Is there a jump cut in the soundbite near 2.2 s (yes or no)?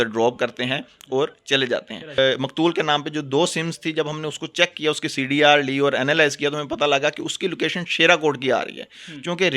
yes